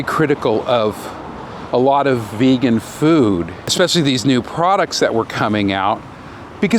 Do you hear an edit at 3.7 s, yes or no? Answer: yes